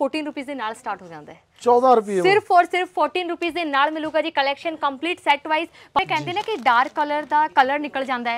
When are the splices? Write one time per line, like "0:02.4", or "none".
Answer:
0:06.0